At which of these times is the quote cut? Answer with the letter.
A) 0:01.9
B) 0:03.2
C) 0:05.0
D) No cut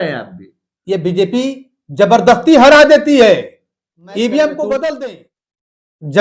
C